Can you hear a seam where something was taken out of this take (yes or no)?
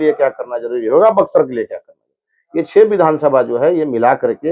no